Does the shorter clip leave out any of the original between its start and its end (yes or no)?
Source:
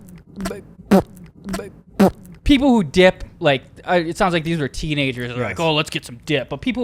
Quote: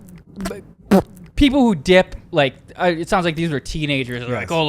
yes